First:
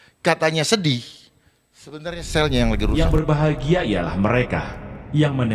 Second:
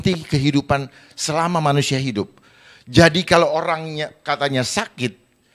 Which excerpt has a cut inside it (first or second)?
first